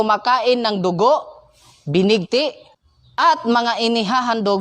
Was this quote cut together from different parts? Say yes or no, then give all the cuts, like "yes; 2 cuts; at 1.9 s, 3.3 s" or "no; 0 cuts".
no; 0 cuts